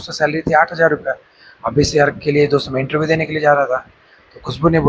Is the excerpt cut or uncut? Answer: uncut